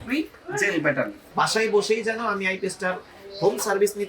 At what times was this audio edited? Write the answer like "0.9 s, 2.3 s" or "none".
1.2 s